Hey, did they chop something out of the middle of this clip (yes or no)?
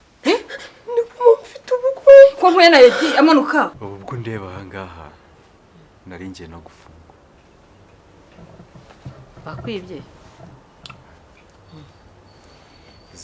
yes